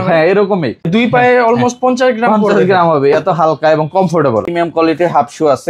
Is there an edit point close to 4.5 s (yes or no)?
yes